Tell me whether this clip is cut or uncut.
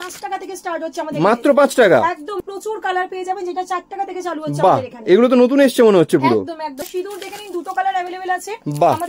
cut